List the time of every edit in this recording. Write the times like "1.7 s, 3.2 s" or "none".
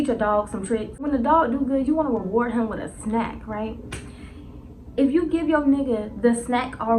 1.0 s